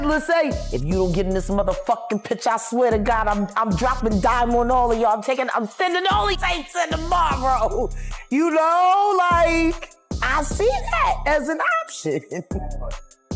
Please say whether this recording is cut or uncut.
cut